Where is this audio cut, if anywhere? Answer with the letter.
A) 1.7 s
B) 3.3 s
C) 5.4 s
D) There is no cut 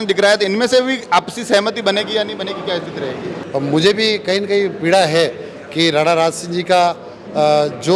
B